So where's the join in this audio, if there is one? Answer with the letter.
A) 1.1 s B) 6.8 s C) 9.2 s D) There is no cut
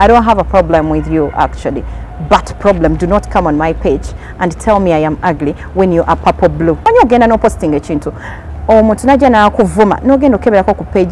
B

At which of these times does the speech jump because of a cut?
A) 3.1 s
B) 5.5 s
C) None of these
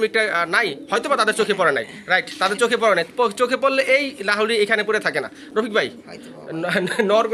C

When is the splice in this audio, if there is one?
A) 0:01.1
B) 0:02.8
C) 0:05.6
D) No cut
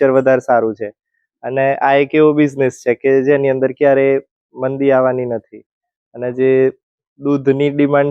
D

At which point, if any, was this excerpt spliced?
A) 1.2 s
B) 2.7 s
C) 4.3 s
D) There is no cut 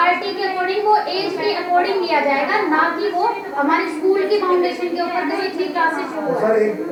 D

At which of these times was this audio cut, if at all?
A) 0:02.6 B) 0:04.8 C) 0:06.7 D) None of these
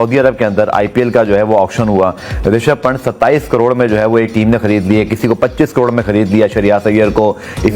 D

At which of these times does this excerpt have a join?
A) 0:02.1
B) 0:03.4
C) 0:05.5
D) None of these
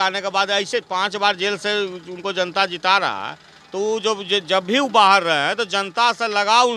D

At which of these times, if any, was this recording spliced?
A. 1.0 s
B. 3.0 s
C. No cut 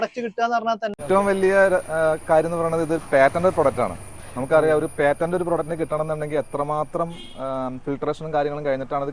A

